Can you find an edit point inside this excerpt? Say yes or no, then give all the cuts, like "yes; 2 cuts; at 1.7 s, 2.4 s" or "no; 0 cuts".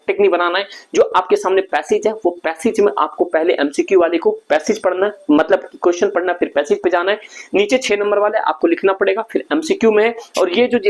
no; 0 cuts